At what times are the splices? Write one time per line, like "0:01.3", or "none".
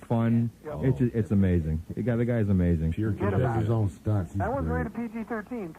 0:02.2